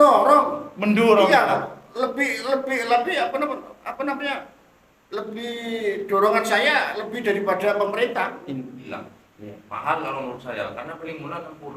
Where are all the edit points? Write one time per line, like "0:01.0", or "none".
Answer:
0:08.9